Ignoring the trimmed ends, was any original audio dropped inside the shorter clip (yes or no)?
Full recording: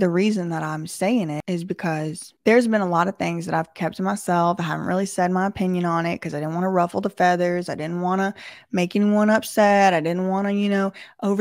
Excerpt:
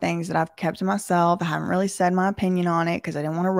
no